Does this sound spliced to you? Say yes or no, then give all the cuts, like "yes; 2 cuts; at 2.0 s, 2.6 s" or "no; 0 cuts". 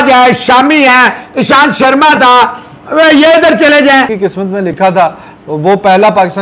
yes; 1 cut; at 4.1 s